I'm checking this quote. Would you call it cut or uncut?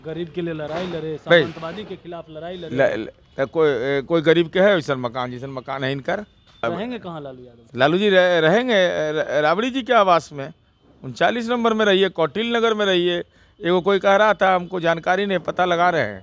cut